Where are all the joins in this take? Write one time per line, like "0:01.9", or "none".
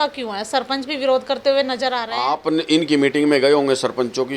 0:02.1